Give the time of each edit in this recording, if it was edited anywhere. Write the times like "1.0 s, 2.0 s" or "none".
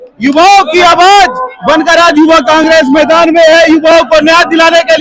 none

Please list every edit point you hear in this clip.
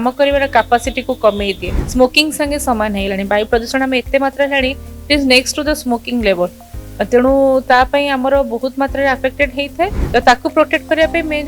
1.7 s, 10.0 s

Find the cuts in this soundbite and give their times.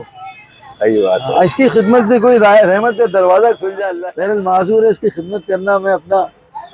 3.9 s

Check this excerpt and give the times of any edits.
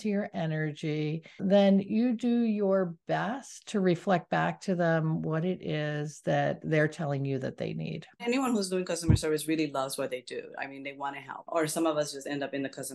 1.4 s, 8.2 s, 11.4 s

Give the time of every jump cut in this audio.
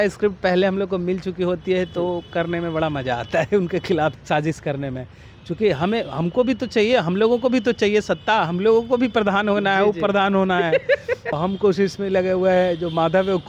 4.2 s, 11.4 s

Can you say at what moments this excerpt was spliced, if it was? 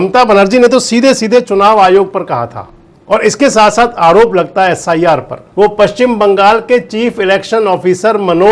5.4 s

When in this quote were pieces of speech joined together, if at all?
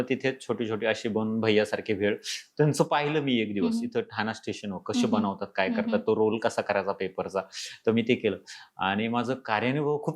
none

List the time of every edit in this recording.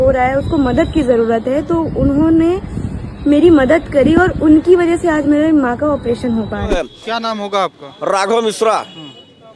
6.7 s

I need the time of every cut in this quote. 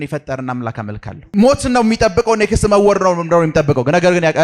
1.2 s

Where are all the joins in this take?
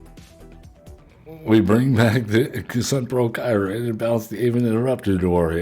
1.0 s

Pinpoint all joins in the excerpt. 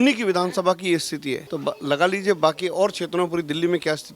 1.5 s

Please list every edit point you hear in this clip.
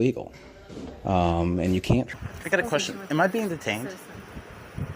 2.1 s

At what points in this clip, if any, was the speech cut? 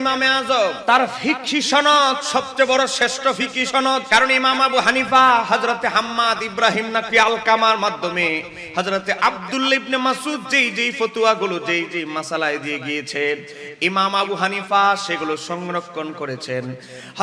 0.8 s, 4.1 s

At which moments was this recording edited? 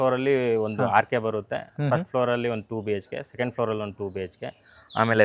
none

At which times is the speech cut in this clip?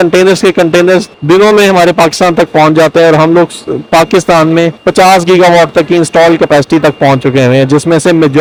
none

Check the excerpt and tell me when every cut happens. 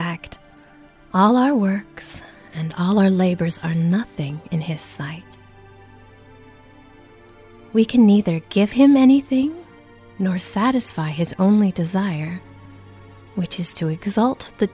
none

